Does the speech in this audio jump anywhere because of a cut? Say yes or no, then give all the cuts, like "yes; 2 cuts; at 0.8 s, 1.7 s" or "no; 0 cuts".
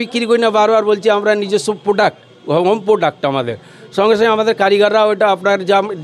no; 0 cuts